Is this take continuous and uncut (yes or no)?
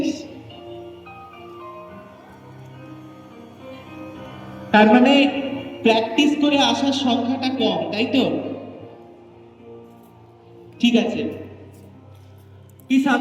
yes